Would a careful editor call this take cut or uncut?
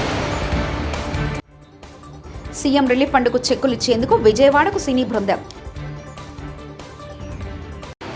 uncut